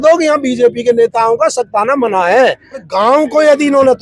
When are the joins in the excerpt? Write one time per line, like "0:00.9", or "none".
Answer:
0:02.9